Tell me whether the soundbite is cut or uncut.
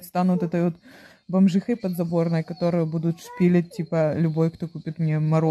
uncut